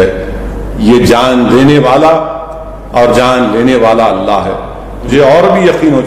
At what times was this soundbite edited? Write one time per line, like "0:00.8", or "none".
0:05.1